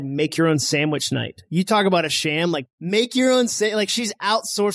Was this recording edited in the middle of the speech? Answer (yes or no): no